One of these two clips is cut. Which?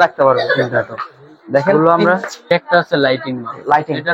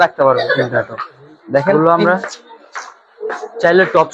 first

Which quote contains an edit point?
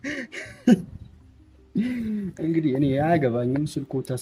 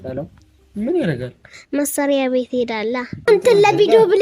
second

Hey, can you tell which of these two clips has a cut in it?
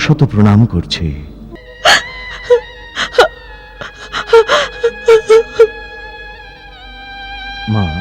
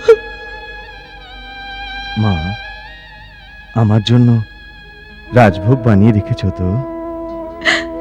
first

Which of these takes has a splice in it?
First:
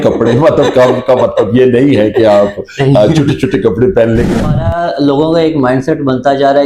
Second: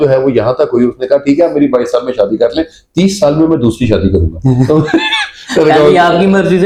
first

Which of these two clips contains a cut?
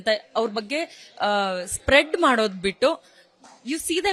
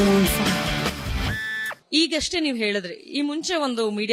second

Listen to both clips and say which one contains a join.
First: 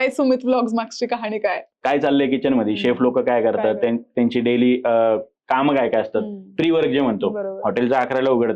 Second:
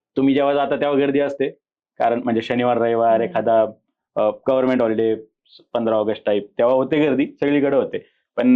first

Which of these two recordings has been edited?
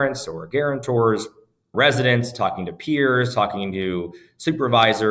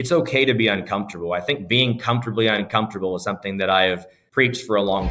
second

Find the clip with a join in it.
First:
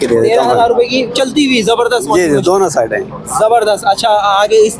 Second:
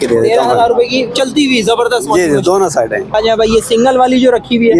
second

